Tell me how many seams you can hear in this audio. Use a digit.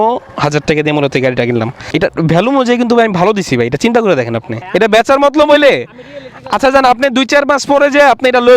2